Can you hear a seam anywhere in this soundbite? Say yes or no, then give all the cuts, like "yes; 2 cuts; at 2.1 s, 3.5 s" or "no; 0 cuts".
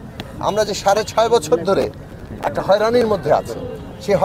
no; 0 cuts